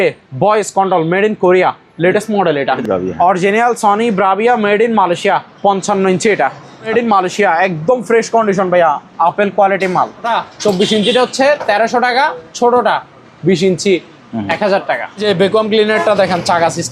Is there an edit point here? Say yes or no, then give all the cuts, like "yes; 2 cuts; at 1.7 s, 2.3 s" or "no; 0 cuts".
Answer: yes; 4 cuts; at 2.8 s, 6.9 s, 10.3 s, 15.2 s